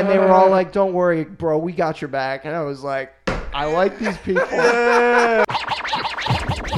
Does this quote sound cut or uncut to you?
cut